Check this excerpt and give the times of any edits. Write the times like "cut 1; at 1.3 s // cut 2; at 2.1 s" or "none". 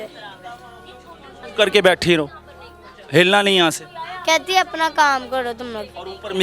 cut 1; at 1.4 s